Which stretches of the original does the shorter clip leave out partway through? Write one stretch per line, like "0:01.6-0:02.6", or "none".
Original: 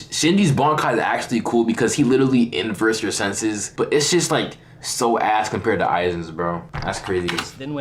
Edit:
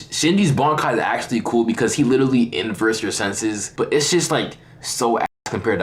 none